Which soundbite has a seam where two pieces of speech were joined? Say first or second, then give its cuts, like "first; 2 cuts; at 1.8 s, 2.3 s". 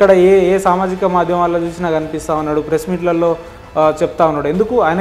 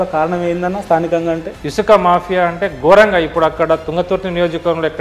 second; 1 cut; at 1.6 s